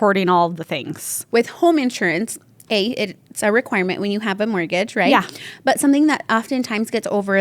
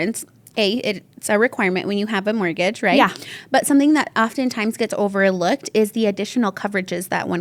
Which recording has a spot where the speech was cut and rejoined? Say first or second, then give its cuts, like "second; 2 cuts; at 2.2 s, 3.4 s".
first; 1 cut; at 1.1 s